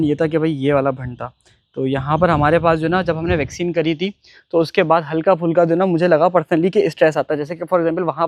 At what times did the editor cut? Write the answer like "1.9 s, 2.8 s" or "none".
none